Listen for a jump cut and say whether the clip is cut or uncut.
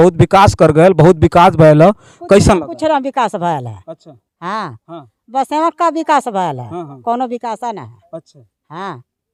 uncut